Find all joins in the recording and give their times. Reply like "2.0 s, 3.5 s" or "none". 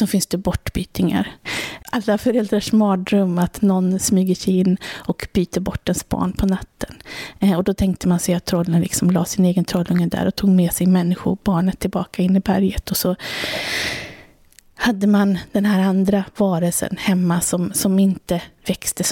1.5 s